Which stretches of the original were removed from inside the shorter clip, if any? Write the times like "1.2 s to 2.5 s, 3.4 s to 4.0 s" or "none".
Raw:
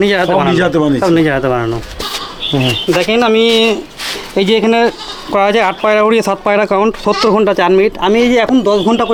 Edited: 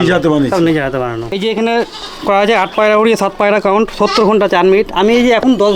1.8 s to 4.4 s